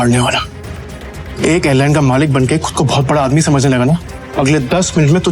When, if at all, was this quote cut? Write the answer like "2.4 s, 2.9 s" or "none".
4.2 s